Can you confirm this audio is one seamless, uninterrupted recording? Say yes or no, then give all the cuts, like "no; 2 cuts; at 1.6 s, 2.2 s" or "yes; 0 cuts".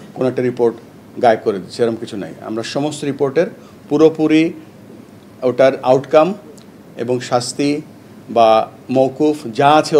yes; 0 cuts